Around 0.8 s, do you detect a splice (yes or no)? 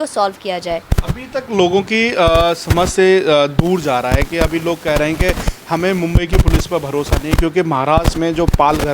no